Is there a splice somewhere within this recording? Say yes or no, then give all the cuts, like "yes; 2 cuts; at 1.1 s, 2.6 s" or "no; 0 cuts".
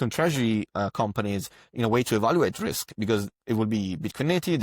no; 0 cuts